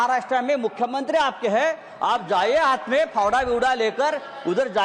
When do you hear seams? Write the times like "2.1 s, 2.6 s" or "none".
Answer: none